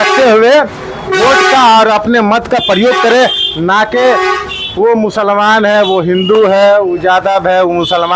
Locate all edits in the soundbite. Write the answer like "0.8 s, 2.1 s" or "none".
none